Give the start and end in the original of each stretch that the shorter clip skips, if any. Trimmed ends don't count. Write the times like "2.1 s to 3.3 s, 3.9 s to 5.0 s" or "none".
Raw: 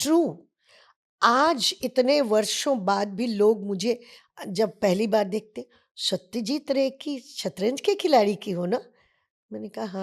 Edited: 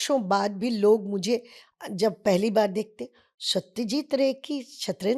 none